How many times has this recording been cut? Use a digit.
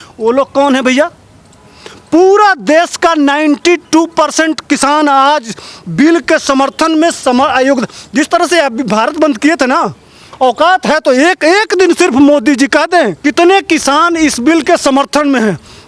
0